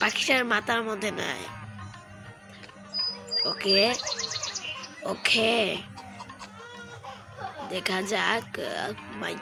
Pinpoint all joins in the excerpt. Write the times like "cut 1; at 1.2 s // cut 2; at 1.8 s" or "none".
none